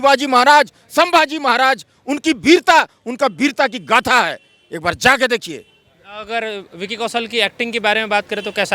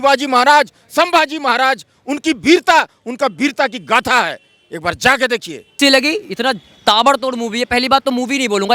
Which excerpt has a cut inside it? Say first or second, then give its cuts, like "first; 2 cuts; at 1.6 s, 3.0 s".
second; 1 cut; at 5.8 s